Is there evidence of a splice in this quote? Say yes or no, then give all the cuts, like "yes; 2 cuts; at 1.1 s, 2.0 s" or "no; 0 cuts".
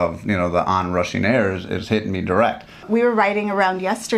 yes; 1 cut; at 2.8 s